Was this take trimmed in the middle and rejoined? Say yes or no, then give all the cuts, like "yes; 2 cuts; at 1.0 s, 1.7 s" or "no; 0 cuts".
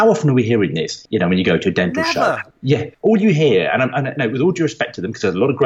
yes; 2 cuts; at 1.0 s, 2.4 s